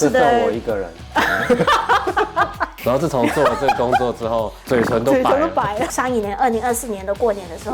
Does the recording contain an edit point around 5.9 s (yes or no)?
yes